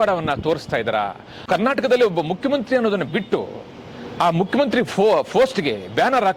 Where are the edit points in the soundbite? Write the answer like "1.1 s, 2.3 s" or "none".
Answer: 1.4 s